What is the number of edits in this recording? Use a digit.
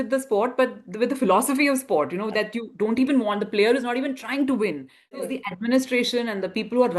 1